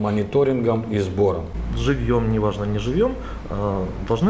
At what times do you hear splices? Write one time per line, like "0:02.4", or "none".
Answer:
0:01.5